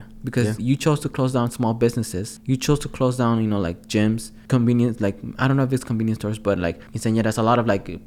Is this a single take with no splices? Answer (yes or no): no